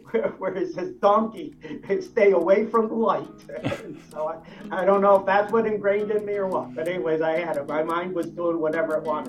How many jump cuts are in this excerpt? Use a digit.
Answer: 0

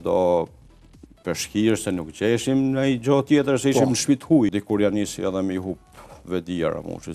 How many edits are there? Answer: 1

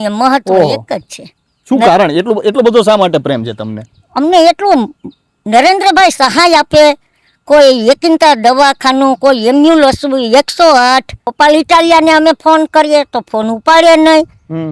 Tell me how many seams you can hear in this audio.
1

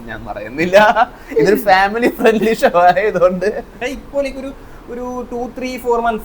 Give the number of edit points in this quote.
1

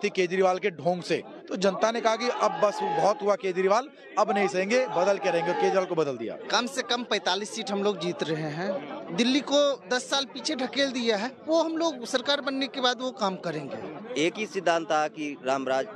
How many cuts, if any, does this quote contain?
4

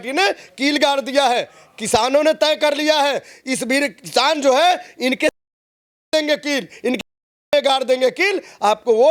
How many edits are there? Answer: 0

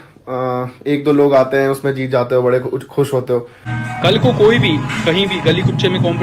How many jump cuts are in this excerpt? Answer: 1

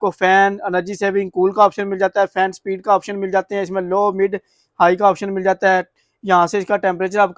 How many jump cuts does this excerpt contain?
0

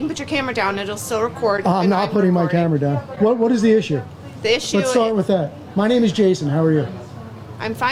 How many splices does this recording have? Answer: 1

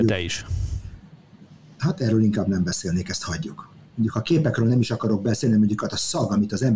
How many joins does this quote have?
1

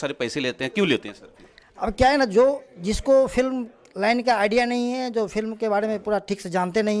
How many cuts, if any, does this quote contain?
0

